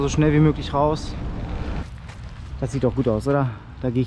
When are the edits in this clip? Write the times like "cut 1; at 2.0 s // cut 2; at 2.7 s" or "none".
cut 1; at 2.4 s